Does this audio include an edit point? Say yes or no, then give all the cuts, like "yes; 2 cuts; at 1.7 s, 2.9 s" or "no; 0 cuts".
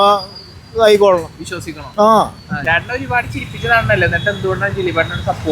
yes; 1 cut; at 2.5 s